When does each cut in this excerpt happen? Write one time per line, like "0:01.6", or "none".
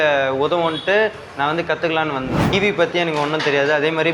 0:02.5

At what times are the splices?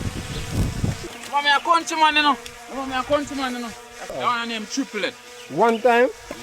0:01.0
0:04.1

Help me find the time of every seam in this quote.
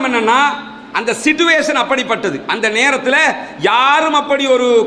none

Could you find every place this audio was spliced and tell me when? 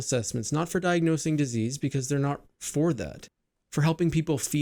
none

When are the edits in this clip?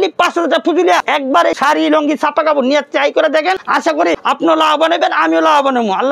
0:01.5
0:04.0

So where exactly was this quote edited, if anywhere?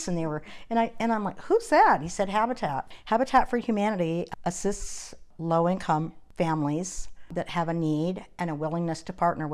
0:02.9
0:04.3
0:05.3
0:06.2
0:07.3

